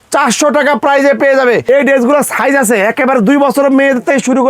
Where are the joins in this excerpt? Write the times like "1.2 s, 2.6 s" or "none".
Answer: 1.6 s